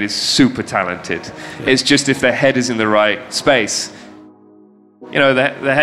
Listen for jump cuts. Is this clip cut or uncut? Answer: cut